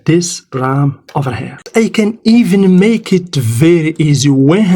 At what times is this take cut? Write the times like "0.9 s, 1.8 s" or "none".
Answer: 1.7 s